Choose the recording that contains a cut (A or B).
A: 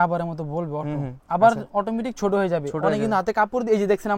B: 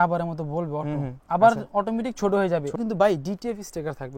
B